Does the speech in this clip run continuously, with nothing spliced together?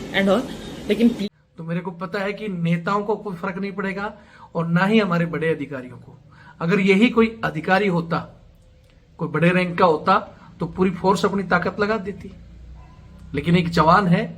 no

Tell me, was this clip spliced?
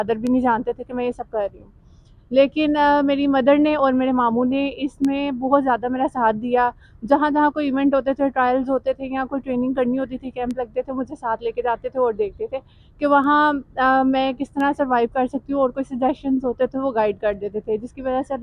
no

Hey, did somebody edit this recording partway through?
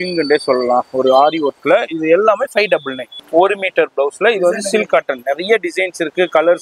yes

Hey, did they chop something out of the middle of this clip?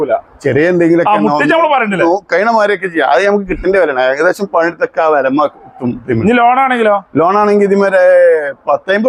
no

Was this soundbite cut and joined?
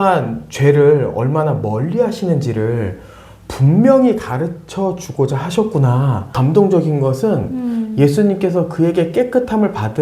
yes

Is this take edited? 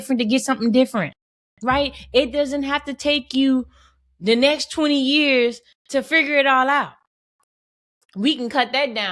no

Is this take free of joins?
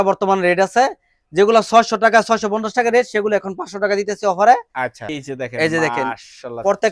no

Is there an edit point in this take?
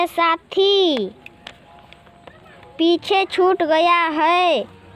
no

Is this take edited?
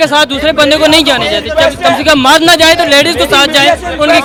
no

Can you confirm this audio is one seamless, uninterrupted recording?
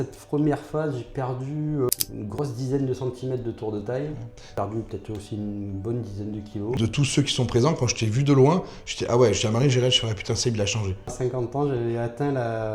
no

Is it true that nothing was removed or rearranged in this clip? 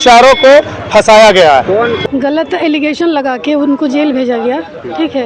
no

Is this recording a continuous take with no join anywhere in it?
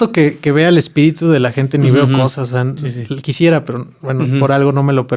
yes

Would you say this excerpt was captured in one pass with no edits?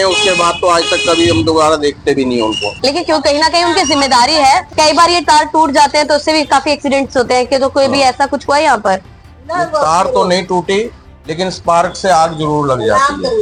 yes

